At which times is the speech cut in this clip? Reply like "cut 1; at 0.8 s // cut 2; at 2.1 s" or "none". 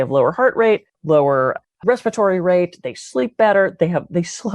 cut 1; at 1.2 s